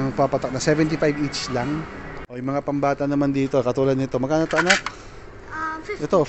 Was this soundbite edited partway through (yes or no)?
yes